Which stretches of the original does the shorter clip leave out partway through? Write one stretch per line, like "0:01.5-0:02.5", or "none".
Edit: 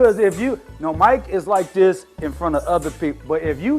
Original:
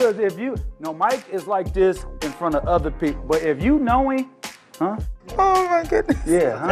none